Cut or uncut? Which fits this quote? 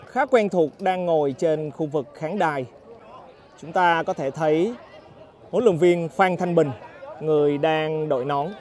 cut